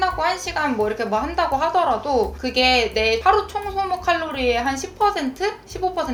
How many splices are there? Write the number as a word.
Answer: zero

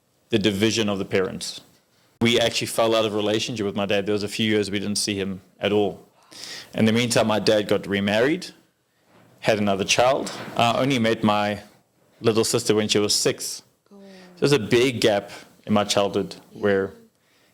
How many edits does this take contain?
one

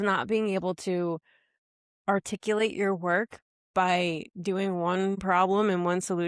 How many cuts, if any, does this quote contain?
one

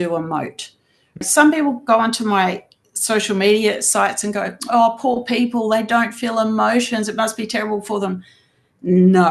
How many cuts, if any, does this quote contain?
one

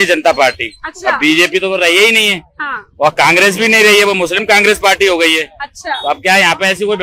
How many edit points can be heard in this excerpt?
zero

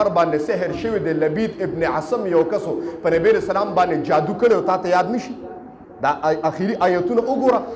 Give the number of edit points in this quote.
zero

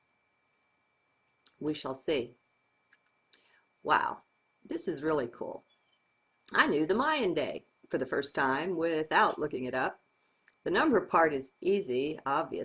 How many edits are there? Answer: one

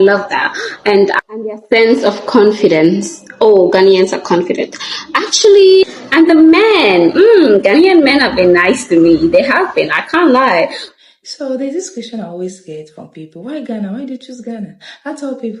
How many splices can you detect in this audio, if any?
three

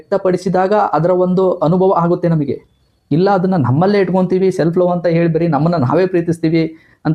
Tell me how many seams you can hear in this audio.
zero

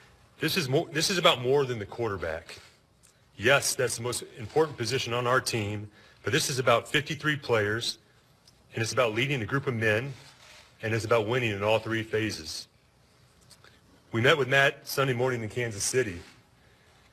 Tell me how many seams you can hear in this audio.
zero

